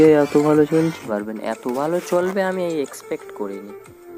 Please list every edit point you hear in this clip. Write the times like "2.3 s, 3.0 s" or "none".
1.1 s